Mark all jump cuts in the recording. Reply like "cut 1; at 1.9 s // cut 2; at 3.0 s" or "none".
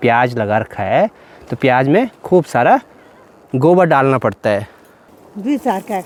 none